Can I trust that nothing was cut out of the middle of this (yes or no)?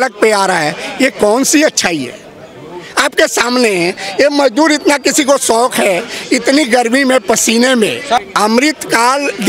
no